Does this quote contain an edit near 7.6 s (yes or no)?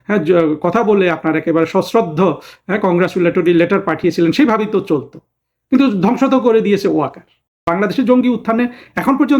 yes